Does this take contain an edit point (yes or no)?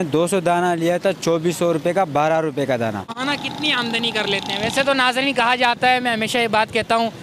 yes